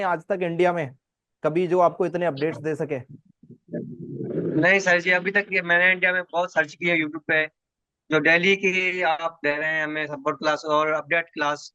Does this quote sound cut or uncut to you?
uncut